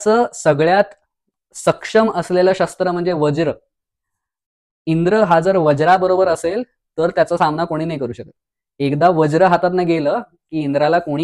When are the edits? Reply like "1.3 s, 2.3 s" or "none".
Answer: none